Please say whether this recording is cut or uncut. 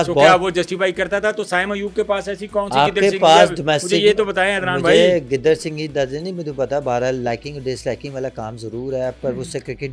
uncut